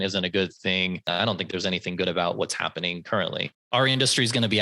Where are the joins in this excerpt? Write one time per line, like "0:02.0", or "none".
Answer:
0:01.1
0:03.5